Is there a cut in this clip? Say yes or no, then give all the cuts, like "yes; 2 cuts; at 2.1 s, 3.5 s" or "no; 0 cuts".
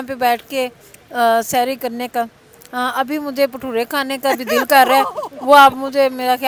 no; 0 cuts